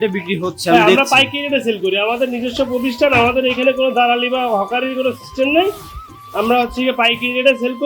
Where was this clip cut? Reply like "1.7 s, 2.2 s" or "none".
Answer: none